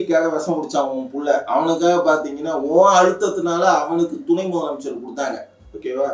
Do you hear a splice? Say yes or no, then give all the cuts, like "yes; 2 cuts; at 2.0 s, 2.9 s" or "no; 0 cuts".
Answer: no; 0 cuts